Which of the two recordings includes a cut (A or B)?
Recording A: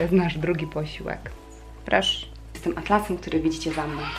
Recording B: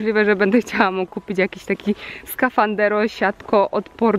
A